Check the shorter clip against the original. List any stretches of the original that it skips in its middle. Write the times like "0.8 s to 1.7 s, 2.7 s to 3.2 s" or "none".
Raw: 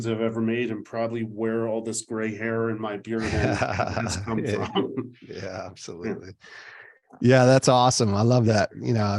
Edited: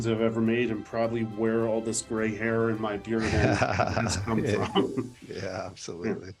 none

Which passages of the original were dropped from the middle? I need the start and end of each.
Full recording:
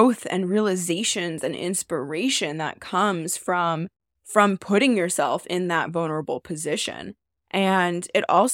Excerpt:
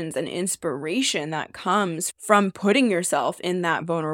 3.3 s to 4.1 s

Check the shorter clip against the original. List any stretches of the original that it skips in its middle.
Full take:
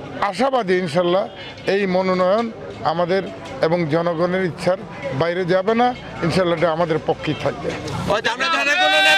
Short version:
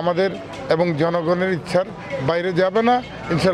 none

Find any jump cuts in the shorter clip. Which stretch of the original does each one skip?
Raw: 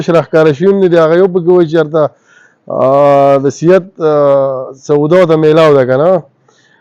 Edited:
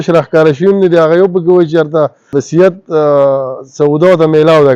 2.4 s to 3.5 s

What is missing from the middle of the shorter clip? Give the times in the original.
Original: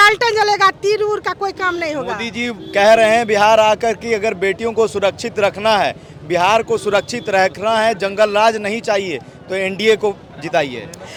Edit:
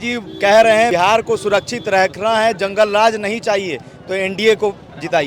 3.2 s to 6.3 s

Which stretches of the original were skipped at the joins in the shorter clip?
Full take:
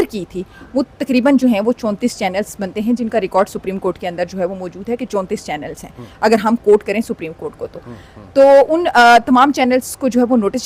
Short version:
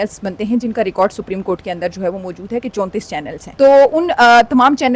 5.8 s to 8.2 s

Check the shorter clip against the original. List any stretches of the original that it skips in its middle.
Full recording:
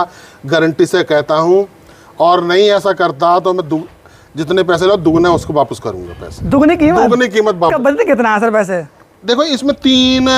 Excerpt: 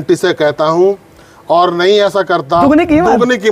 3.3 s to 6.5 s

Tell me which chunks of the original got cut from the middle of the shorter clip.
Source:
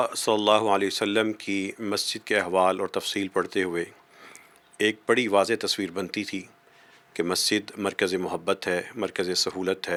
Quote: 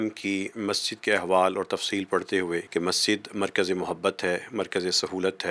3.9 s to 7.1 s

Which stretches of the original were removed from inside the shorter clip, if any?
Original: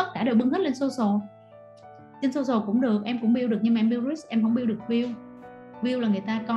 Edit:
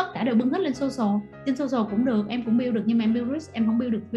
1.3 s to 2.1 s

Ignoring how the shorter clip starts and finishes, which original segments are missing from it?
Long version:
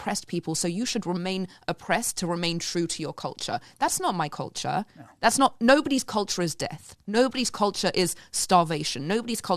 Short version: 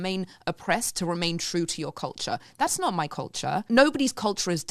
4.9 s to 5.6 s

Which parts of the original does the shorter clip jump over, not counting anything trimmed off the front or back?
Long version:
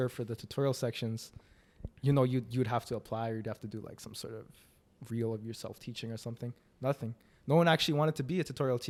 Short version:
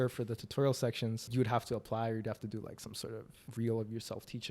1.3 s to 2.5 s, 4.6 s to 4.9 s

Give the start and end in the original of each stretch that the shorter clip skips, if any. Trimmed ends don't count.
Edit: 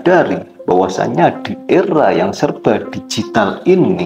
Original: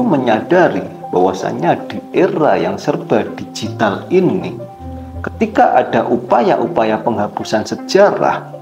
none

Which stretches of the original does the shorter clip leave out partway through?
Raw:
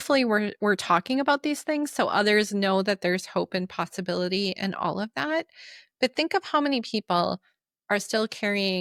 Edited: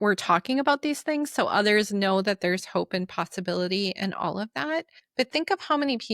5.6 s to 5.8 s

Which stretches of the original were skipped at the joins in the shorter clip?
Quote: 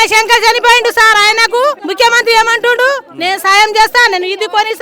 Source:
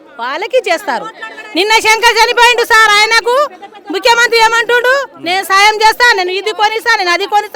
3.6 s to 3.9 s

